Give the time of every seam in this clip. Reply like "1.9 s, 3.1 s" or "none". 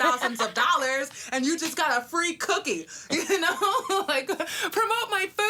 none